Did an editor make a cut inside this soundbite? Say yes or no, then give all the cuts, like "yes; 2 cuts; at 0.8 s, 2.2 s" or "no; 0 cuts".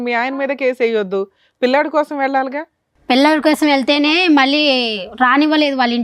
no; 0 cuts